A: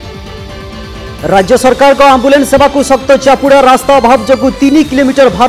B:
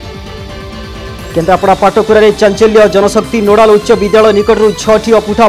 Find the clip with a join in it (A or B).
B